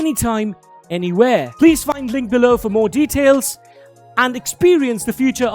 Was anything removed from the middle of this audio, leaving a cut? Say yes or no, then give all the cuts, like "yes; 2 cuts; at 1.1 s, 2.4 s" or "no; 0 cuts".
yes; 1 cut; at 1.5 s